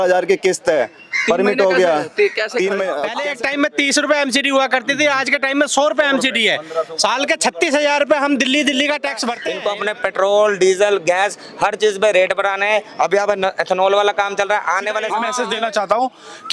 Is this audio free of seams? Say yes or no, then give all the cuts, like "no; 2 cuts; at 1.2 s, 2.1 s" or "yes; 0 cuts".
no; 3 cuts; at 3.1 s, 9.3 s, 15.3 s